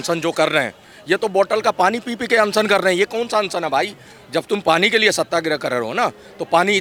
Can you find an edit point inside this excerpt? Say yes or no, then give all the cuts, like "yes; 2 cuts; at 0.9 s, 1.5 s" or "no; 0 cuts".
no; 0 cuts